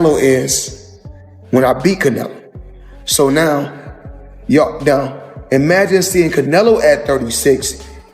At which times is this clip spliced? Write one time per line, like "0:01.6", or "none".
none